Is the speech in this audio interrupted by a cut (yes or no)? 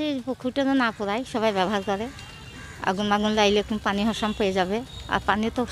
no